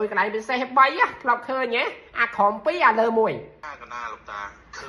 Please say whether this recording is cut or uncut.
cut